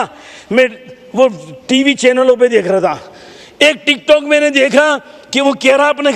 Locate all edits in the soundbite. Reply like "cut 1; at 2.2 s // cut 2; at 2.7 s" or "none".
none